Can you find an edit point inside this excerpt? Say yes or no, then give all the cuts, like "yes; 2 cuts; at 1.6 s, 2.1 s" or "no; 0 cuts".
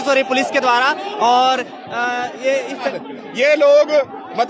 yes; 1 cut; at 3.0 s